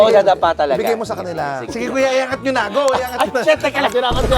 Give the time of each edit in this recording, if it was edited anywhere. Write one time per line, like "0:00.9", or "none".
0:01.7